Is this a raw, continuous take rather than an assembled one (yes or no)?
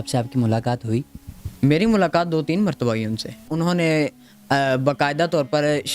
no